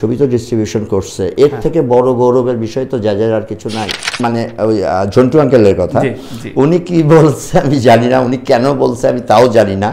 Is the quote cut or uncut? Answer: cut